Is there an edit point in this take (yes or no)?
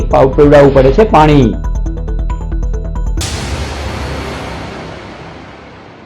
yes